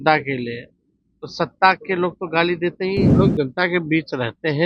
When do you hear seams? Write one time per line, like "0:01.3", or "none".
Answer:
0:03.1